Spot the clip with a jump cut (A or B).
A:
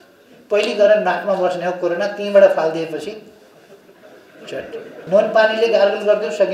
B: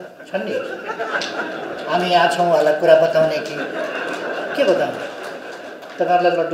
A